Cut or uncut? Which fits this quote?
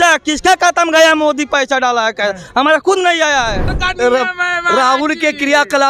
cut